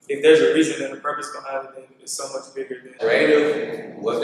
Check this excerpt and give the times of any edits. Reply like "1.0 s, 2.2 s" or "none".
3.0 s